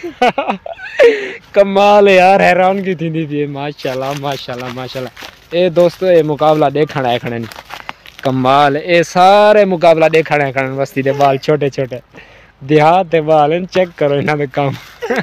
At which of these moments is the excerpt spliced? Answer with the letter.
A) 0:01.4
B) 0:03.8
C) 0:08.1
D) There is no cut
D